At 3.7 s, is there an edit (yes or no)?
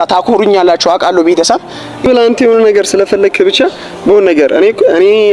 no